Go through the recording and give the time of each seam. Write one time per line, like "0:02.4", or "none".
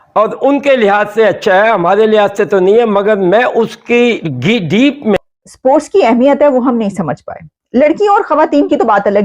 0:05.2